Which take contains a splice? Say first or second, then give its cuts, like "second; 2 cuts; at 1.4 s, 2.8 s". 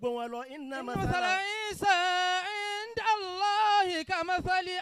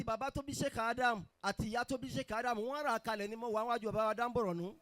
second; 1 cut; at 1.3 s